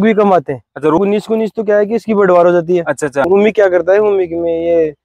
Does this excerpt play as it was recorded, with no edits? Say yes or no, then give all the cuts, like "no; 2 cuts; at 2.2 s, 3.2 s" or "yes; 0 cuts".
no; 2 cuts; at 1.0 s, 3.3 s